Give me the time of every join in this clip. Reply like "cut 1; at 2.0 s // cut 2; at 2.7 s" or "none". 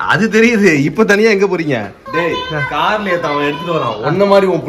cut 1; at 2.1 s